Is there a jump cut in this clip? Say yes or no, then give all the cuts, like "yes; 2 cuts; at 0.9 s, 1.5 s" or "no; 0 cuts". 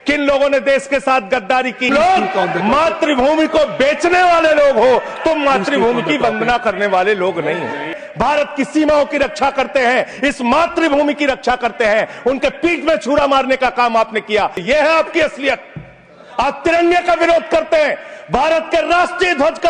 yes; 3 cuts; at 1.9 s, 8.0 s, 14.6 s